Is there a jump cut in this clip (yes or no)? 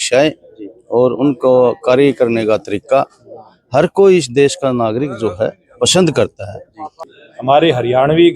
yes